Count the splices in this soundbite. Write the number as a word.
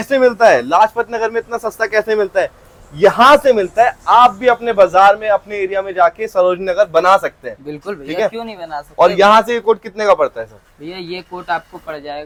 zero